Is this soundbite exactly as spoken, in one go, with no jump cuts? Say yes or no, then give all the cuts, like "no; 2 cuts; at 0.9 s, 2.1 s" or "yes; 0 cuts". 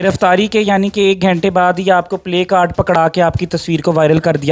yes; 0 cuts